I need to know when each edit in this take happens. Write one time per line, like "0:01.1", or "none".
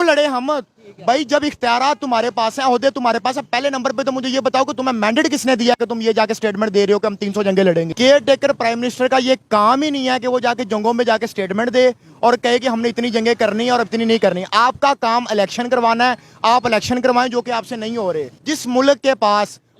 0:07.9
0:18.3